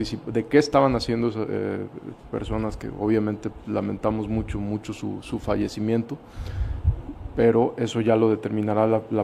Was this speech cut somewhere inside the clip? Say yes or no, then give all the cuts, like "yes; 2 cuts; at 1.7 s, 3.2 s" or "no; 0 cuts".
no; 0 cuts